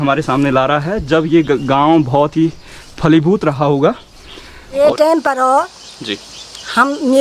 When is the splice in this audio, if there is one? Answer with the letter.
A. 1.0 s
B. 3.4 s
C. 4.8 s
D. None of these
C